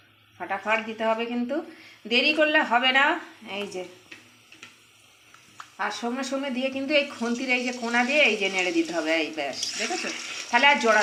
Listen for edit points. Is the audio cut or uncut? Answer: uncut